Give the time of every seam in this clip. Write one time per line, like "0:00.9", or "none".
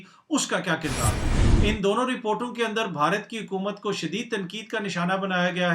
0:01.2